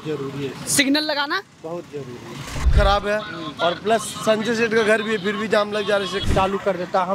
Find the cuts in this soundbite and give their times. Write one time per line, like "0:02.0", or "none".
0:02.7
0:06.2